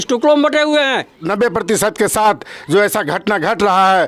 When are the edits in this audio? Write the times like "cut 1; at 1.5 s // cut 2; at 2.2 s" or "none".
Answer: cut 1; at 1.2 s